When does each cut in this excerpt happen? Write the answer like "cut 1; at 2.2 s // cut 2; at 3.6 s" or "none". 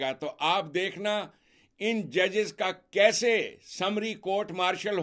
none